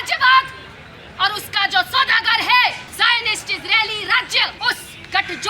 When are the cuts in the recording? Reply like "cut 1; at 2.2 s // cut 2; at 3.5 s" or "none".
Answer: cut 1; at 2.8 s // cut 2; at 4.5 s